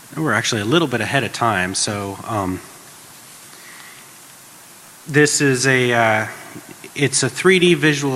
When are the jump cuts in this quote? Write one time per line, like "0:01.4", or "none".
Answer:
none